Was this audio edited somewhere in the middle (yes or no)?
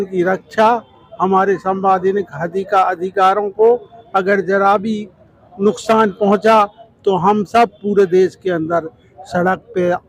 no